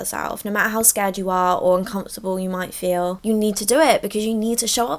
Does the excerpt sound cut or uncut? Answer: uncut